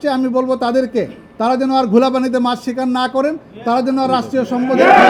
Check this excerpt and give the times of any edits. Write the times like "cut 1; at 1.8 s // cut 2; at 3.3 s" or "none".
none